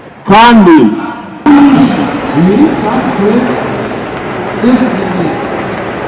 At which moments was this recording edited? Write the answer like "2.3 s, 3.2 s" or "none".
1.5 s